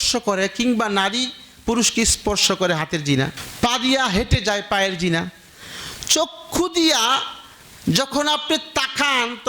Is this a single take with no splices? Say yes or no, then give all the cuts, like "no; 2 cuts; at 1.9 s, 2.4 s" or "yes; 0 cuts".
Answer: no; 1 cut; at 3.4 s